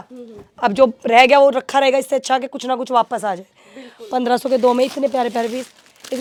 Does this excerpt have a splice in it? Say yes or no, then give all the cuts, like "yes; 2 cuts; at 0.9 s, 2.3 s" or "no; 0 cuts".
no; 0 cuts